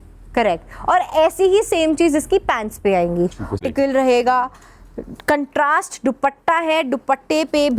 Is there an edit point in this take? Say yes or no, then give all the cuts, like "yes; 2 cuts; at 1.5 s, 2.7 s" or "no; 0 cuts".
yes; 1 cut; at 3.6 s